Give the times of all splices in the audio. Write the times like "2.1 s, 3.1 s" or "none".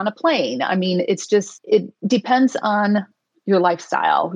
1.6 s